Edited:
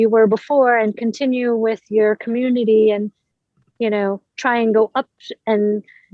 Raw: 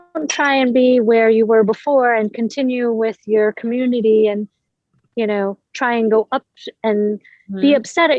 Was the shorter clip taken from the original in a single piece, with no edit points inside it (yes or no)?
yes